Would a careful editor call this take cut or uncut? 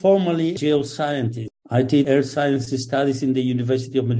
cut